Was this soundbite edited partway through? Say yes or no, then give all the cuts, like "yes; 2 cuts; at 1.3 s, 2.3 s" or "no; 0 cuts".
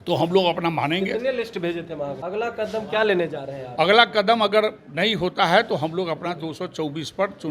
yes; 1 cut; at 2.2 s